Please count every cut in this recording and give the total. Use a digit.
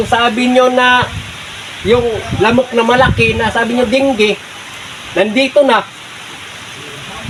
0